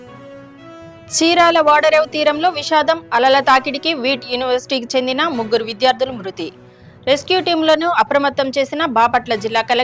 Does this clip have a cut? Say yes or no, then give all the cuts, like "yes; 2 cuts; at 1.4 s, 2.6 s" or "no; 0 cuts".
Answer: yes; 1 cut; at 1.2 s